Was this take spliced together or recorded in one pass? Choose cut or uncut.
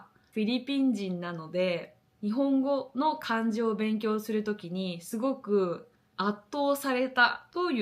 cut